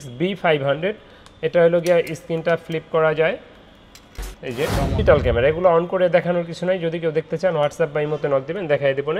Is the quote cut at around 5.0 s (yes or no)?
yes